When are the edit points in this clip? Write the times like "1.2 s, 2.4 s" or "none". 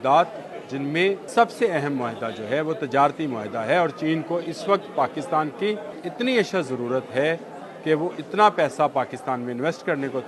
1.2 s, 6.0 s